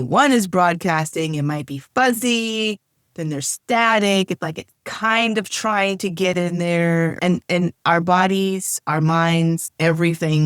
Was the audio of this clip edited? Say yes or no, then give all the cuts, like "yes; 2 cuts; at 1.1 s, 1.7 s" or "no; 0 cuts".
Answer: yes; 1 cut; at 7.1 s